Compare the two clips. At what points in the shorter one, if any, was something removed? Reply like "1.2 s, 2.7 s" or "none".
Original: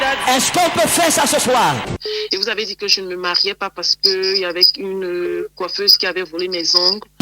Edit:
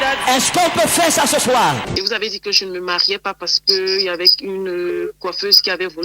1.9 s